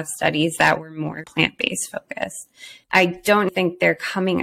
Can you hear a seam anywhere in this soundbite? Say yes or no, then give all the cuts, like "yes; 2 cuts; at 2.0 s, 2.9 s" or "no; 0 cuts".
yes; 2 cuts; at 1.3 s, 3.5 s